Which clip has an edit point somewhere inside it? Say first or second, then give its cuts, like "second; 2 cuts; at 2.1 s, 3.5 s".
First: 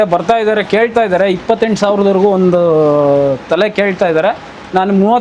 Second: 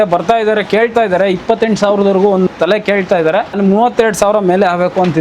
second; 2 cuts; at 2.5 s, 3.6 s